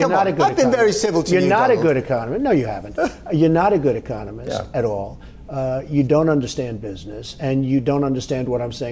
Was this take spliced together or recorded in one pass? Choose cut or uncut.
uncut